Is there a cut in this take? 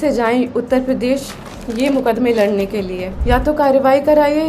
yes; 1 cut; at 3.1 s

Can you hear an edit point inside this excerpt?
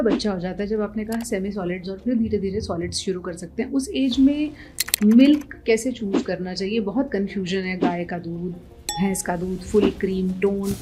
no; 0 cuts

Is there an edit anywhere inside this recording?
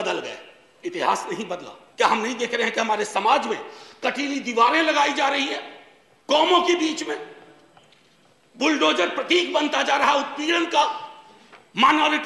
yes; 1 cut; at 1.8 s

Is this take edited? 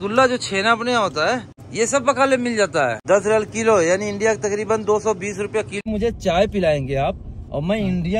yes; 3 cuts; at 1.6 s, 3.0 s, 5.7 s

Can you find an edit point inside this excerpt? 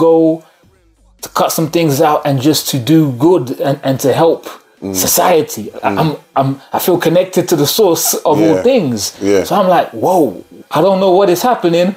no; 0 cuts

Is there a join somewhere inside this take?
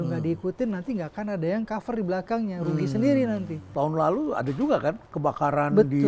yes; 1 cut; at 3.6 s

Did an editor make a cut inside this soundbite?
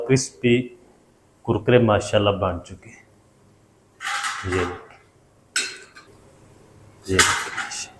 yes; 1 cut; at 6.1 s

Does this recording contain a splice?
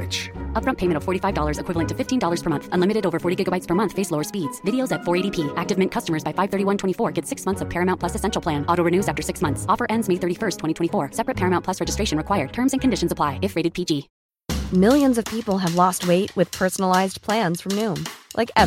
yes; 1 cut; at 14.1 s

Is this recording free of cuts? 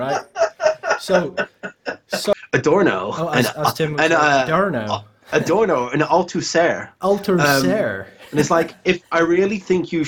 no; 1 cut; at 2.3 s

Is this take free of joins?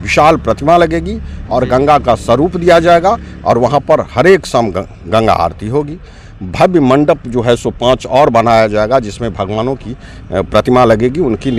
yes; 0 cuts

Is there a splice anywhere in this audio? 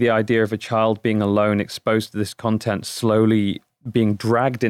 no; 0 cuts

